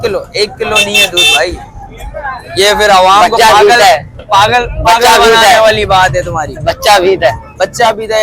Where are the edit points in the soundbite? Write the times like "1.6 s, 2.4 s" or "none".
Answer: none